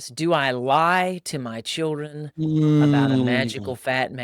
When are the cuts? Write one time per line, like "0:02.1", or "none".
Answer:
none